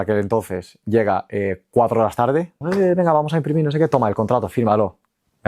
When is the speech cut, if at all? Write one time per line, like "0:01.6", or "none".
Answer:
0:02.6